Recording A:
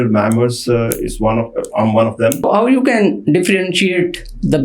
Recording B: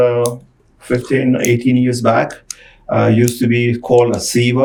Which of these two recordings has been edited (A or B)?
A